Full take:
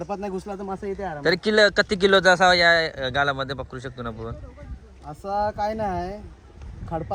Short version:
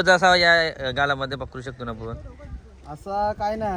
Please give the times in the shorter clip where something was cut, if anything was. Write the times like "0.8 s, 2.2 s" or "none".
none